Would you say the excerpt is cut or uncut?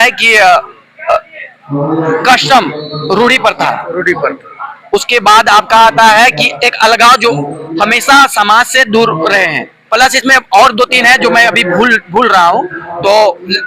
cut